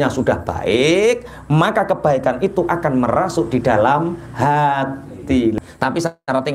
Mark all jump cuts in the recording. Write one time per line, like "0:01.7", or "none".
0:05.5

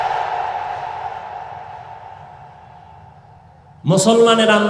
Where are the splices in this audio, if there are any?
none

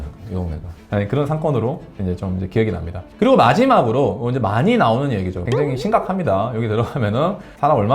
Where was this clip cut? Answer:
0:03.0
0:05.4

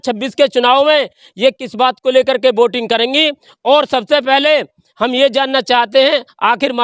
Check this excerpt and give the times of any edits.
none

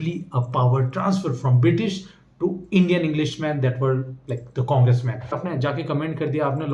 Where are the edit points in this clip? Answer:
0:05.4

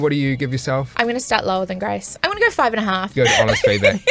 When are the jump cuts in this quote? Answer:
0:00.9
0:02.1
0:03.1

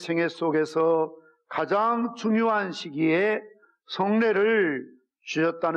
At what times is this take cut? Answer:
0:03.0

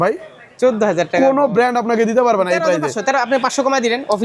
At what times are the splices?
none

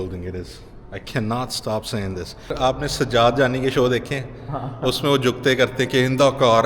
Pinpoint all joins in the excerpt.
0:02.4

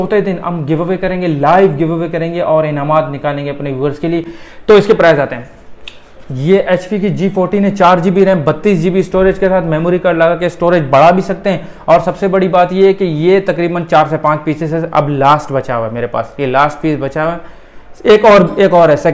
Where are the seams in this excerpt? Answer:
none

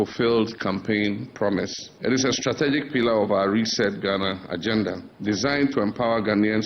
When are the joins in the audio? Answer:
0:01.8
0:05.1

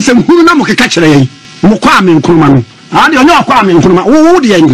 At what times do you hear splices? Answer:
0:01.4

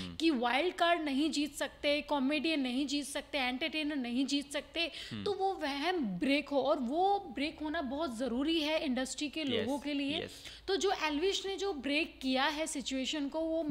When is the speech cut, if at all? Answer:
none

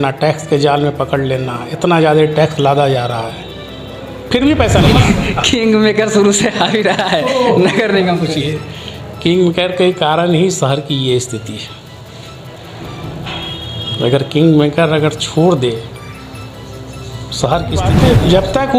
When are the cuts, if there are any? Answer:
0:04.9
0:17.9

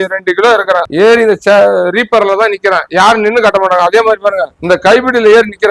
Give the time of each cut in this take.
0:00.9
0:04.5

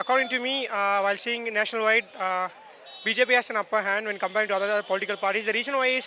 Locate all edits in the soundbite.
none

